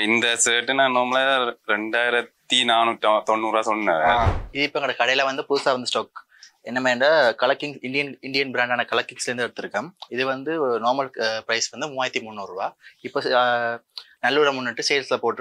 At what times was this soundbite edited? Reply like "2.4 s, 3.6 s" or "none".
4.3 s